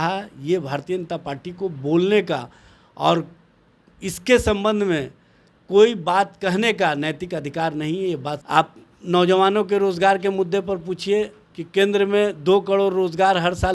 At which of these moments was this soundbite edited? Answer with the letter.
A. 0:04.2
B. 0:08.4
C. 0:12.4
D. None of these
B